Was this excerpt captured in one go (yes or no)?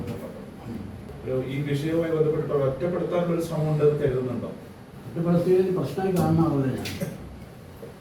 no